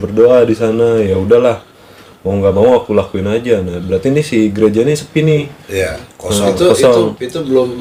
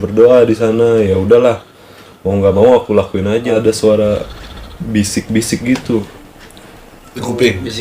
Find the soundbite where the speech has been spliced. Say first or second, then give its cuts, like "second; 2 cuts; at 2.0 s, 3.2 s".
second; 1 cut; at 3.5 s